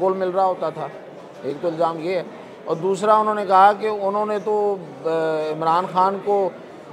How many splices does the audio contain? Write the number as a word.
zero